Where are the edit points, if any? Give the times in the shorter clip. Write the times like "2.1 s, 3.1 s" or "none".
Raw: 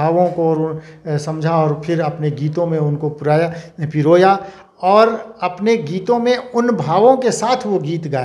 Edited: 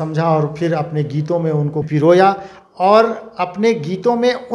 1.9 s